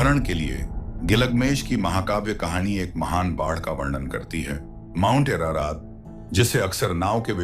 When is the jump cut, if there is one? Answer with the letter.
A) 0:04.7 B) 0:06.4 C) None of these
A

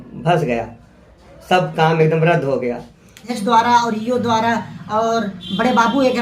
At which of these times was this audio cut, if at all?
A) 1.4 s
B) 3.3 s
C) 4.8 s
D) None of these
B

